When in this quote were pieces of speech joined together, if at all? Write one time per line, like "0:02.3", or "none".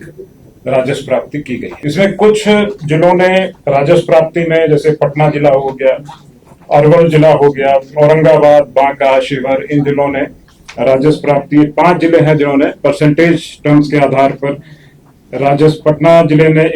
0:01.7